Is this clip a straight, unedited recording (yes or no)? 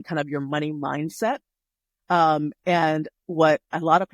yes